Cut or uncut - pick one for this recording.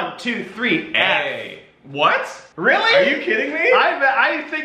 uncut